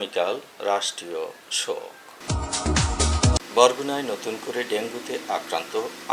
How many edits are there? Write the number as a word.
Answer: two